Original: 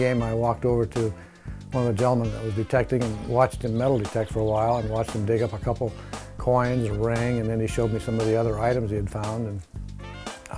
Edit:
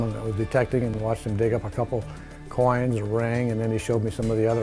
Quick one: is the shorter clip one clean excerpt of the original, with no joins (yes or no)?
no